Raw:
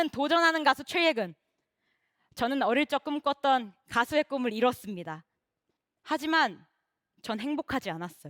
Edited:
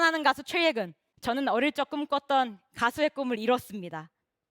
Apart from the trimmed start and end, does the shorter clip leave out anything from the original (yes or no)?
yes